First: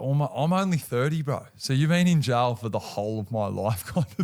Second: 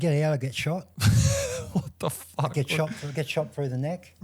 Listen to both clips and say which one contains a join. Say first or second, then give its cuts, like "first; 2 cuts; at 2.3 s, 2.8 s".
second; 1 cut; at 0.9 s